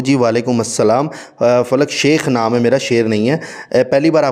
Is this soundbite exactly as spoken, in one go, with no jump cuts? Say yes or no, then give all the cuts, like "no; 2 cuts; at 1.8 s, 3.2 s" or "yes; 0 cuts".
yes; 0 cuts